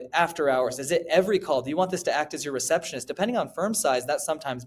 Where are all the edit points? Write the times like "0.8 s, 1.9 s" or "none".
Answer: none